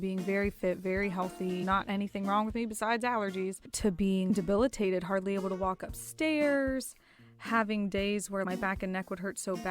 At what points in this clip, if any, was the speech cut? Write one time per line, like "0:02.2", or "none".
0:04.3
0:08.4